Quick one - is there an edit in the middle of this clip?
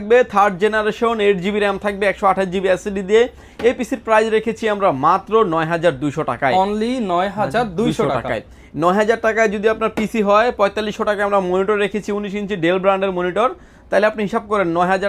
no; 0 cuts

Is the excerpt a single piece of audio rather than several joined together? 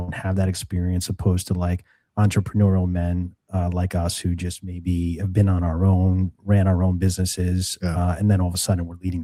yes; 0 cuts

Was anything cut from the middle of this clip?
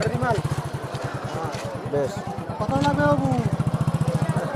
no; 0 cuts

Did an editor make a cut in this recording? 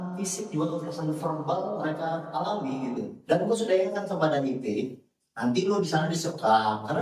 no; 0 cuts

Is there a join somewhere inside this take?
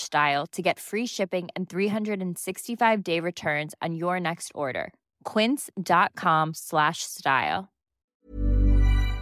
yes; 1 cut; at 8.1 s

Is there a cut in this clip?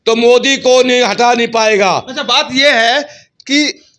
no; 0 cuts

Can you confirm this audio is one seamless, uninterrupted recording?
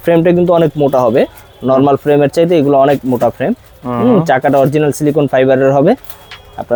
yes; 0 cuts

